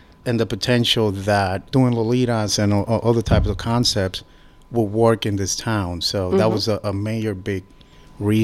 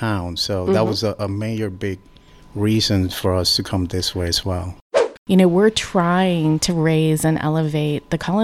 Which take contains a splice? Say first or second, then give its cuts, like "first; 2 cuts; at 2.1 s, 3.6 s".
second; 1 cut; at 4.8 s